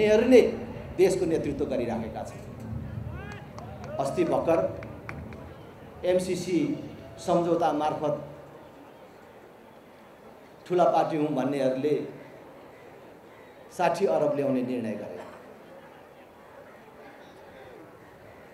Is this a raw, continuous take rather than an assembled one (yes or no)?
yes